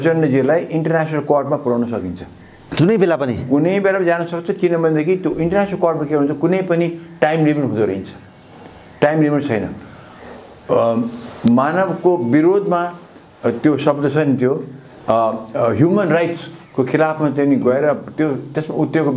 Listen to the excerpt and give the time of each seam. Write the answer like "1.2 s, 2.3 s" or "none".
none